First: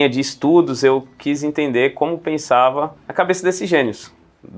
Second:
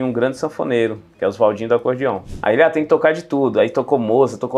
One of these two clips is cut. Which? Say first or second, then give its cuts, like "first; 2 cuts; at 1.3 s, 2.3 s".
second; 1 cut; at 2.3 s